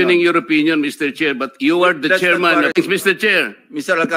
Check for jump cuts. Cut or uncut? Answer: cut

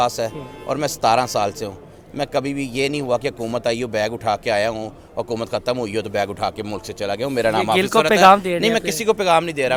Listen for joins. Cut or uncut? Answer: uncut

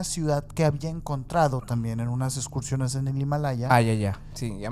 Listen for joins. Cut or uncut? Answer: uncut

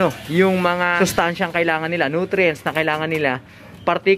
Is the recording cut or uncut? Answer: cut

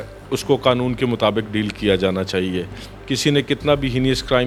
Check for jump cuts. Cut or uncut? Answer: uncut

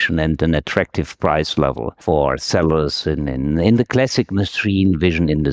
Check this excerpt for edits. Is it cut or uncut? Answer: uncut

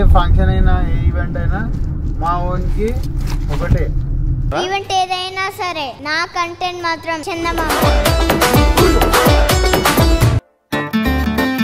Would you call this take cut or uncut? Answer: cut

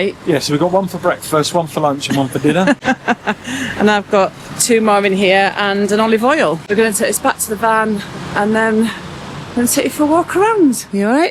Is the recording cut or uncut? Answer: uncut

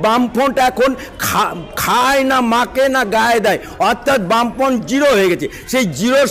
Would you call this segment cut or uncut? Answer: uncut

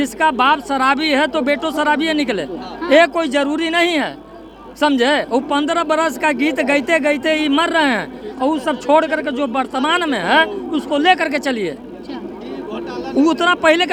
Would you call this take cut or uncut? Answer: uncut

